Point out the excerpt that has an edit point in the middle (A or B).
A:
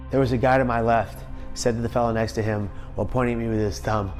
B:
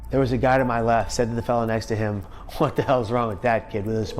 B